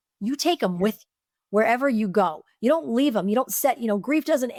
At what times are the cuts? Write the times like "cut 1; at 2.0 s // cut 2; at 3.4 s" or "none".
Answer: none